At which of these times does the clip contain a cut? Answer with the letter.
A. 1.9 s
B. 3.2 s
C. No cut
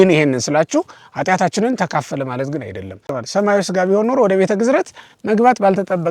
B